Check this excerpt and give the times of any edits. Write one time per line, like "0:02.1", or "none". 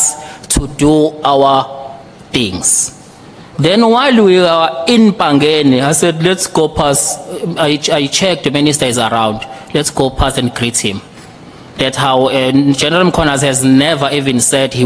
none